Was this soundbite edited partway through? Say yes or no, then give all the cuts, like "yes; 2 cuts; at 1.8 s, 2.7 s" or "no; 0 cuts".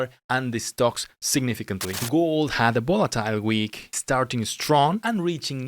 yes; 1 cut; at 1.9 s